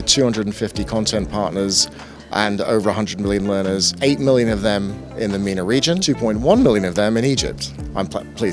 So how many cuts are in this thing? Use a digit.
2